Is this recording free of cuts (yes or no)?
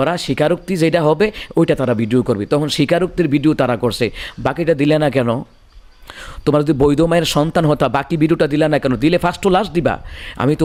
yes